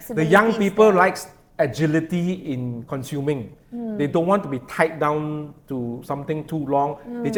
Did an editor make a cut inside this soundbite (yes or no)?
no